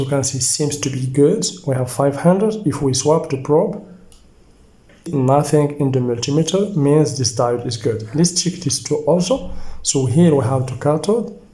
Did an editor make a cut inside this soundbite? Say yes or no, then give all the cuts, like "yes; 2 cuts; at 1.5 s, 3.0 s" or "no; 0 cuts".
yes; 1 cut; at 5.1 s